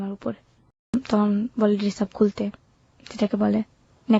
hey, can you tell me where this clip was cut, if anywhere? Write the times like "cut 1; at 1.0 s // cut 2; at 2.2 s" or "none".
cut 1; at 0.9 s